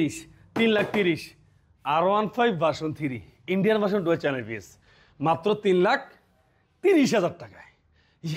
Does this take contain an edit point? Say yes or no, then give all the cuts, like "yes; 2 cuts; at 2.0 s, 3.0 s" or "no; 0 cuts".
no; 0 cuts